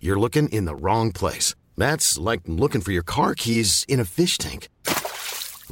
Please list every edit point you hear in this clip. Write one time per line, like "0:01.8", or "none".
none